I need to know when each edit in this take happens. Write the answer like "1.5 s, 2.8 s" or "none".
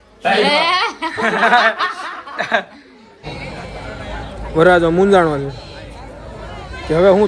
3.2 s